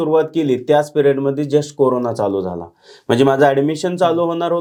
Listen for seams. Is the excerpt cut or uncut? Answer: uncut